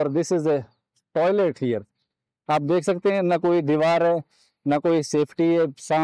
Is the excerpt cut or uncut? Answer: uncut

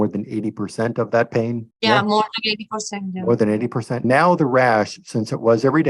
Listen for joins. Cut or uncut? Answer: cut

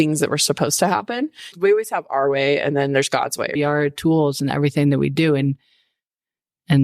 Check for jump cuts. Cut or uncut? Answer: cut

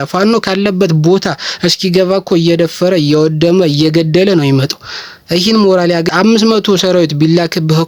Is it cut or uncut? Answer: cut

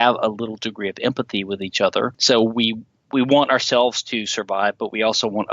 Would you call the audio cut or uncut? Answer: cut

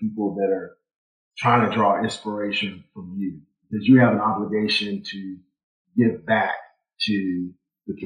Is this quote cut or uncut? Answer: uncut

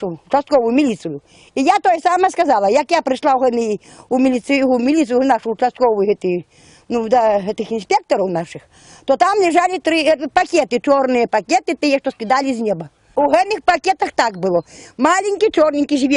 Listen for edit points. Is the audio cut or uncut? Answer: uncut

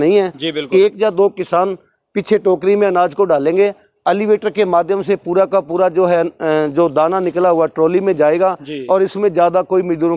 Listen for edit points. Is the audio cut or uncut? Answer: uncut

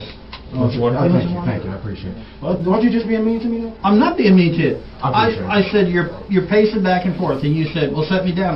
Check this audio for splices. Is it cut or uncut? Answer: uncut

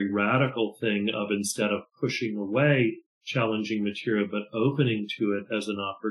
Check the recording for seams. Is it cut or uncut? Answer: uncut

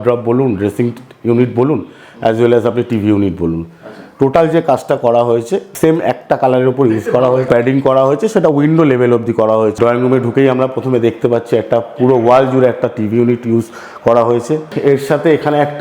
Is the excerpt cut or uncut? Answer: cut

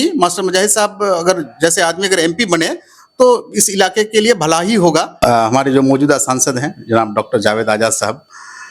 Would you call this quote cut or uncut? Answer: cut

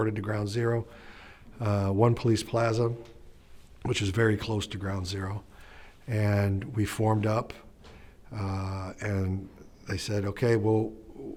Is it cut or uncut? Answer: uncut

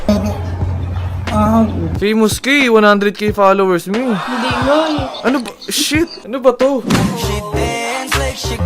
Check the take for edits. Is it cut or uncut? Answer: cut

